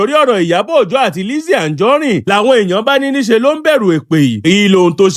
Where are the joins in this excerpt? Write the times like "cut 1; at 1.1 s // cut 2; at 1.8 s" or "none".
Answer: none